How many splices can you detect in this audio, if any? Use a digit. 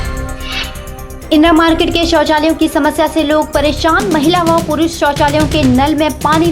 1